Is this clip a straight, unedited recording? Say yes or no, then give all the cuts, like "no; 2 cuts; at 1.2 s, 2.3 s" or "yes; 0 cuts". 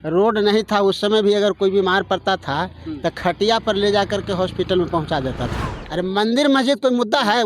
no; 1 cut; at 5.6 s